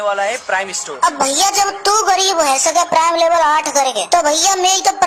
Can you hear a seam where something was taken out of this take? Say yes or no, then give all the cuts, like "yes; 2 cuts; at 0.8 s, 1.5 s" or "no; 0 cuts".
yes; 1 cut; at 0.9 s